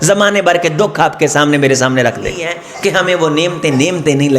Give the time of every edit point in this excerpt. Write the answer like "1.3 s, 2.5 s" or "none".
2.6 s

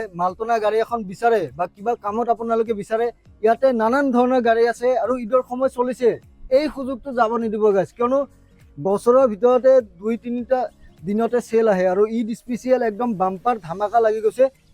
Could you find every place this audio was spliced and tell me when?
none

